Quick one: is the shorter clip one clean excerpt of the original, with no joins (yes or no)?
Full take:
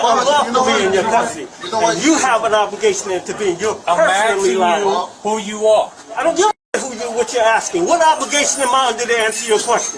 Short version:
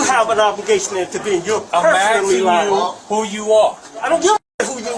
yes